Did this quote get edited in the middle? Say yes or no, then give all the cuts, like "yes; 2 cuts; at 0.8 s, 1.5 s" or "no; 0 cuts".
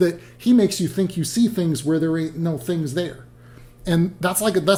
no; 0 cuts